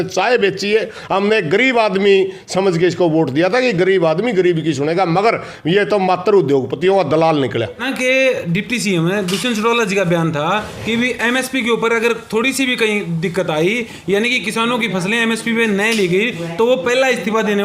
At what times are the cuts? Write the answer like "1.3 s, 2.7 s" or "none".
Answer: 7.9 s